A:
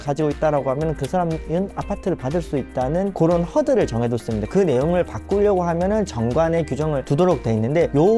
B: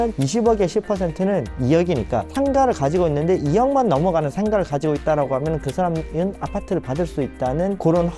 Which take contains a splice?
A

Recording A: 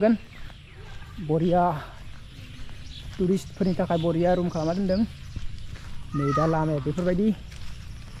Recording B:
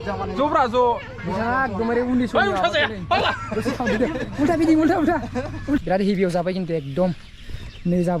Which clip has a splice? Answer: B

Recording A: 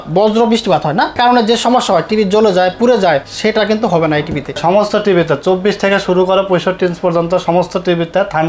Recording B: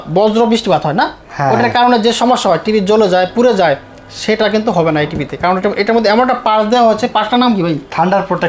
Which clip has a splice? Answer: A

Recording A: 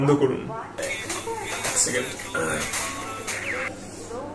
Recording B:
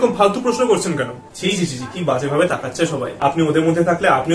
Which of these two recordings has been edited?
B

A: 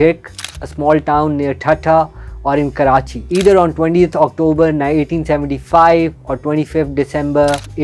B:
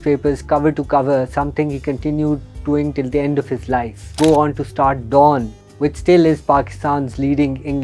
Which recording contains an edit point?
B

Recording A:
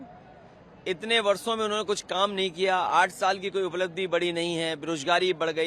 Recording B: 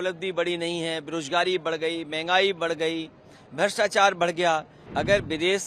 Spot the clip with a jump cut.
B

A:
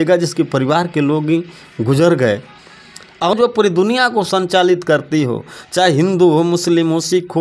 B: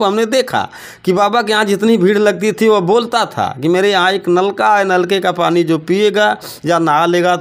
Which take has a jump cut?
A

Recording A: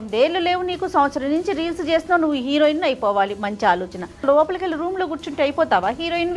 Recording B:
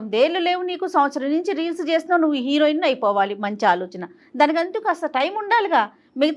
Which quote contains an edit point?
A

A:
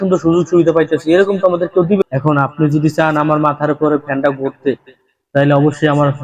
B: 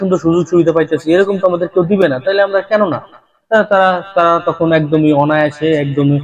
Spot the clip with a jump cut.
A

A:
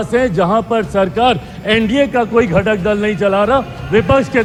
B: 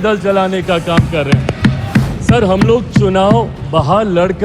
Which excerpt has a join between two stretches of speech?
B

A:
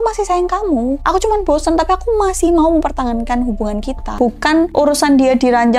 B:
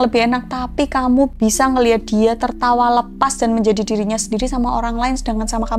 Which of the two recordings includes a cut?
A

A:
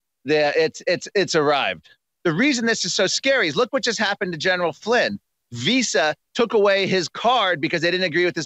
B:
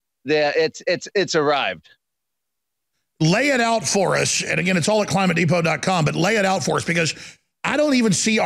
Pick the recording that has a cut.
A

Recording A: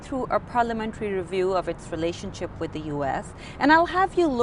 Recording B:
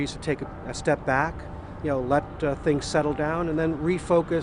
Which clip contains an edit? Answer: B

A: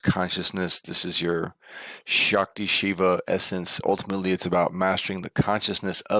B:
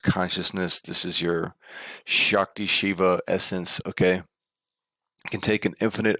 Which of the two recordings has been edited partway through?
A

